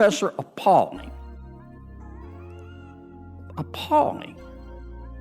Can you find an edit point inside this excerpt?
yes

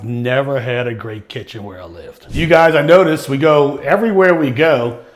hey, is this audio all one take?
no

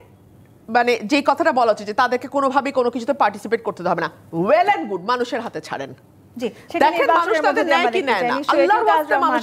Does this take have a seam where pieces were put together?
no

